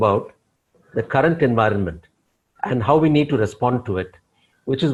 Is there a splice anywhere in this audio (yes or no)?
no